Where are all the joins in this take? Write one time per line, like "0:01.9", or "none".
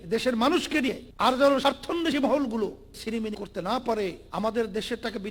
0:01.1
0:03.0
0:04.2